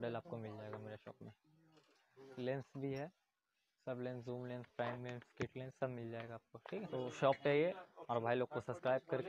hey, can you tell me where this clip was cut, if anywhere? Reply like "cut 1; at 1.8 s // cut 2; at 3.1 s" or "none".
cut 1; at 6.9 s // cut 2; at 7.9 s

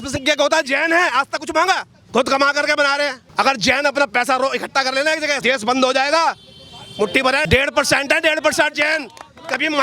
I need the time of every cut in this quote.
cut 1; at 1.9 s // cut 2; at 3.2 s // cut 3; at 5.4 s // cut 4; at 7.4 s

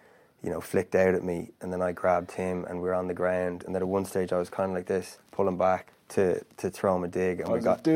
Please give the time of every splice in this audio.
cut 1; at 3.6 s // cut 2; at 5.2 s // cut 3; at 6.0 s

